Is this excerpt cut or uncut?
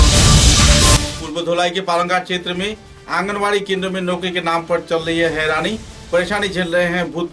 uncut